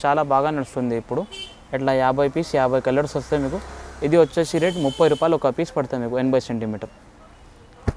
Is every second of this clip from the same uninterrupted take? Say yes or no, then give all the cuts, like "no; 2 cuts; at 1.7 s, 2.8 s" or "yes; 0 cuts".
yes; 0 cuts